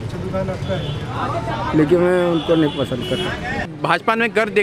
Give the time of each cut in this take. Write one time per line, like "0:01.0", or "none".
0:03.7